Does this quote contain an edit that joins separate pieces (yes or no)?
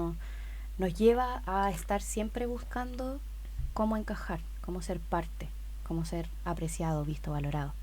no